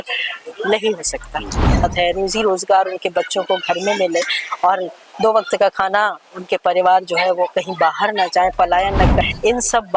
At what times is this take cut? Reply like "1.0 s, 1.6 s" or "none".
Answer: 1.8 s, 9.2 s